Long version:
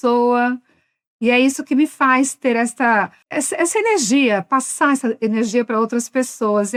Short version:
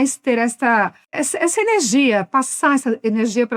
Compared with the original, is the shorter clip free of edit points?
yes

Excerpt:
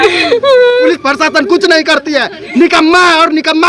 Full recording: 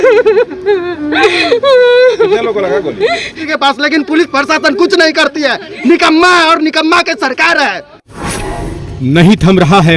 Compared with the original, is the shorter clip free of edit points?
no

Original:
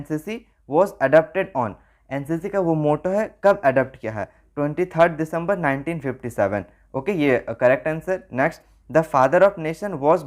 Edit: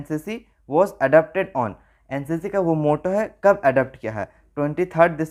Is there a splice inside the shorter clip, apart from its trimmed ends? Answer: no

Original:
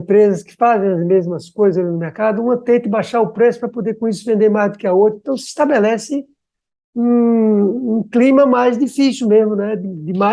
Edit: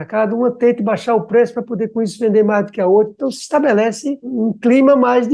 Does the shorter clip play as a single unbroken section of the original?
no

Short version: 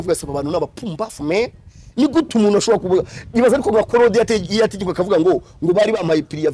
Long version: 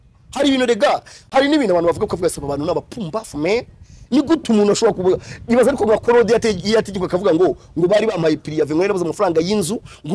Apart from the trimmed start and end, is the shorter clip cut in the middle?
no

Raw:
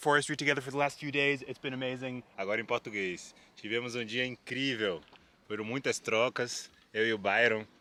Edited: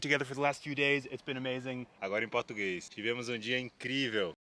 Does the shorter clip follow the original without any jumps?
no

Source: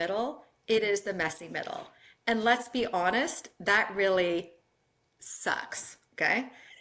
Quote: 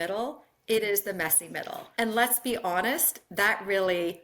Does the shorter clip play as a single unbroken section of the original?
no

